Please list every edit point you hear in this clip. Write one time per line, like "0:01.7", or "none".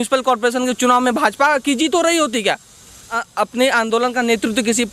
0:03.2